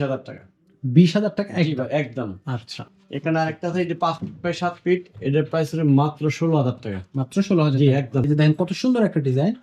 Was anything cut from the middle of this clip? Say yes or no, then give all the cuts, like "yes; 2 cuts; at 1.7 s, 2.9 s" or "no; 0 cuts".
yes; 1 cut; at 8.3 s